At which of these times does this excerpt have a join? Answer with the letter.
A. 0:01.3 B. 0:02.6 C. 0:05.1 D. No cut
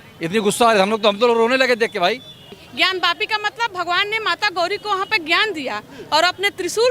B